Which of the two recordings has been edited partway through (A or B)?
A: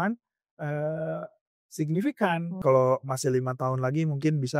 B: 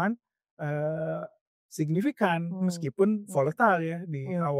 A